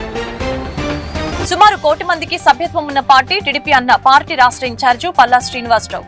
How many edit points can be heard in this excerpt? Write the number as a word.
one